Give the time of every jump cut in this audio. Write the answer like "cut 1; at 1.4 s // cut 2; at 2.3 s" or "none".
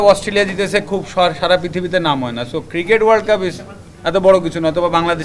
none